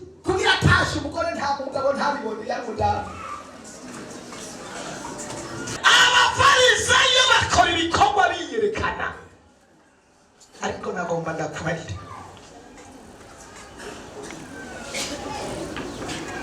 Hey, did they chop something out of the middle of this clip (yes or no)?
yes